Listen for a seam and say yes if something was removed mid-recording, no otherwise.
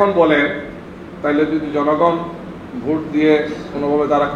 no